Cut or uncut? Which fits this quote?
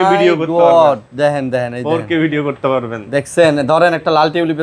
uncut